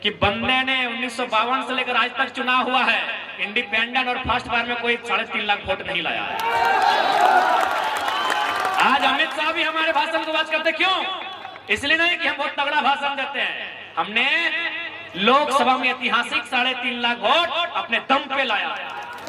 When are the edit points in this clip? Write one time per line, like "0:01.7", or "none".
none